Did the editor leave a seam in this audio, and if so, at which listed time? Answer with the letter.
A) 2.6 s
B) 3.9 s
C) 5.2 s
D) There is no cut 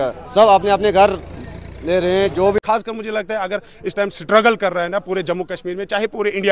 A